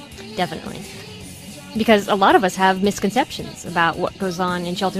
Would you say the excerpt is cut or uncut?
cut